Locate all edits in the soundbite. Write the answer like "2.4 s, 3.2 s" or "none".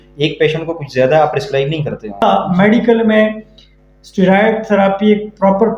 2.2 s